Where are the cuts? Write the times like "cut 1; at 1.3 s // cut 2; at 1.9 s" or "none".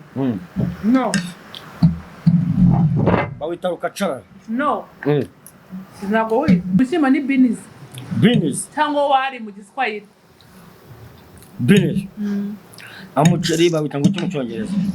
cut 1; at 6.8 s